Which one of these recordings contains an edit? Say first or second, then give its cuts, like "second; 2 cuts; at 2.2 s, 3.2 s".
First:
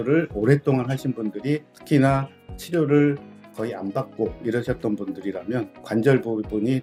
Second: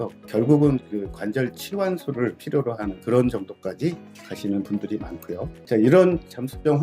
second; 1 cut; at 5.6 s